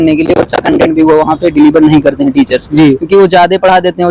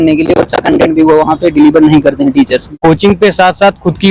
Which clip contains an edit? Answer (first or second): second